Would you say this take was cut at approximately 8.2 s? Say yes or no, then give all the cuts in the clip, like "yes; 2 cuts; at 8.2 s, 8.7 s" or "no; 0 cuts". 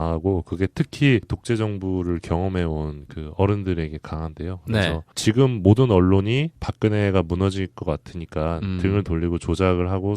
no; 1 cut; at 0.9 s